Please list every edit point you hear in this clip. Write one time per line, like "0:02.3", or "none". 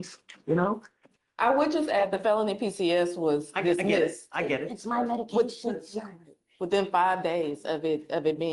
none